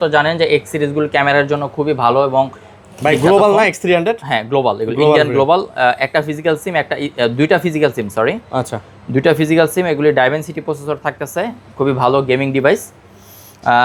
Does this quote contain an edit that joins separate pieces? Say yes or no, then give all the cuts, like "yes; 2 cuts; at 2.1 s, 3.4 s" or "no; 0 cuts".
no; 0 cuts